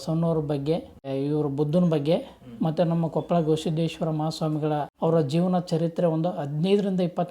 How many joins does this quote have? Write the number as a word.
two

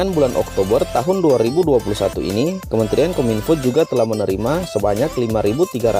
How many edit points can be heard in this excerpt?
zero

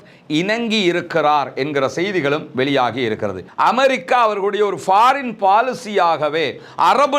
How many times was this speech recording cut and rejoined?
one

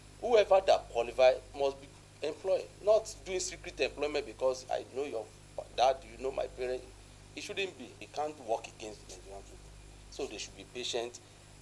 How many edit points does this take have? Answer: one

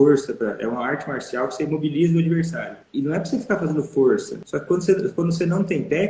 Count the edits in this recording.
two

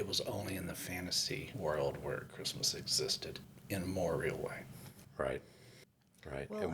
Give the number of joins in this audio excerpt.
one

